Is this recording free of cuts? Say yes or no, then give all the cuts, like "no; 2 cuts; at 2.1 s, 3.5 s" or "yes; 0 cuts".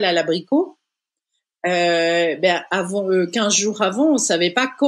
yes; 0 cuts